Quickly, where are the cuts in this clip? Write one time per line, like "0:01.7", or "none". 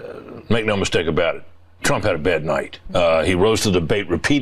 0:02.8